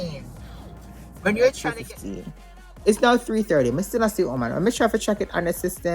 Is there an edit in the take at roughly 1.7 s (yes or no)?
yes